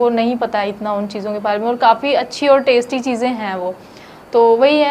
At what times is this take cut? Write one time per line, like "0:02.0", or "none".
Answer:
none